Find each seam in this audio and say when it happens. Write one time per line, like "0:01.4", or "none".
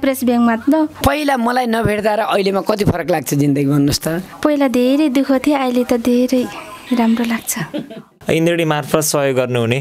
0:01.0
0:08.2